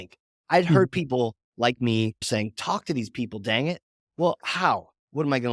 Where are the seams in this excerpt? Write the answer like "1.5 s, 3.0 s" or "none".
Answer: 2.3 s